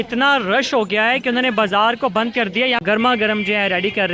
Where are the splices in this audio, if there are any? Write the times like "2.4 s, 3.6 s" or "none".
2.8 s